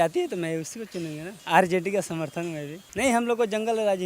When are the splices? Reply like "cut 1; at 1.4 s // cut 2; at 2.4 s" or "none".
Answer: cut 1; at 1.3 s // cut 2; at 2.8 s